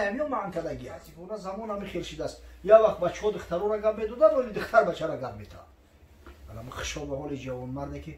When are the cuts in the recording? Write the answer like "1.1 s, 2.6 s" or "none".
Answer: 1.2 s